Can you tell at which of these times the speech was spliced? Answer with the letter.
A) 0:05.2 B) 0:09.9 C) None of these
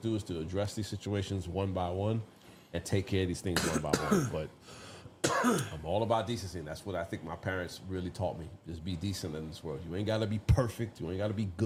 C